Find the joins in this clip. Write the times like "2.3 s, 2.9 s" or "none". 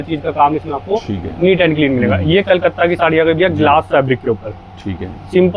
none

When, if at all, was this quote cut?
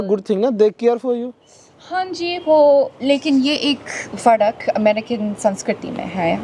none

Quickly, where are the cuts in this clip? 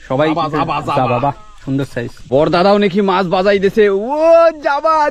2.3 s

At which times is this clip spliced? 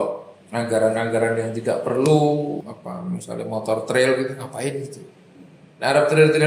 2.6 s

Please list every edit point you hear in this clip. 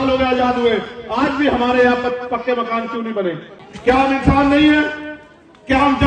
3.5 s

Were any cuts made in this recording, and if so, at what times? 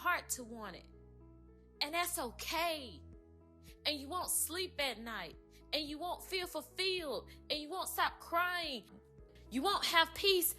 9.2 s

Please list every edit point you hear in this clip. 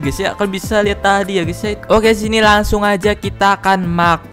1.7 s

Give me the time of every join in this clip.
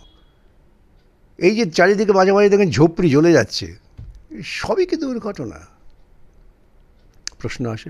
none

